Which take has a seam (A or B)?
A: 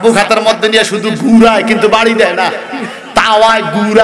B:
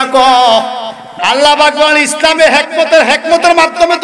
B